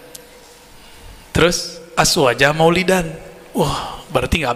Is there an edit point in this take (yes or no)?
no